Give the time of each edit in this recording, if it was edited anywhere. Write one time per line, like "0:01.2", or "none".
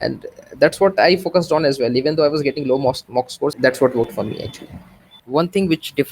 0:03.5
0:05.2